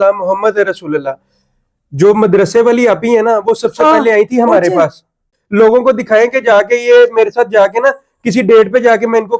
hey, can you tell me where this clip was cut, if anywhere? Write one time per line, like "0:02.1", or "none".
0:05.3